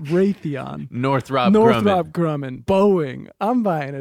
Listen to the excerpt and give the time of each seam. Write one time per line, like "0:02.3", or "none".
0:02.5